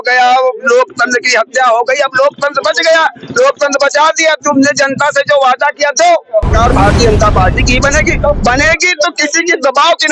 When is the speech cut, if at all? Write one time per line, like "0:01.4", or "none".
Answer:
0:06.5